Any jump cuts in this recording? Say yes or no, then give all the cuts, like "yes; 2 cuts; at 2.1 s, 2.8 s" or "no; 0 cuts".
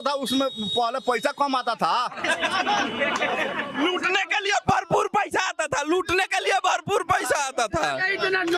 no; 0 cuts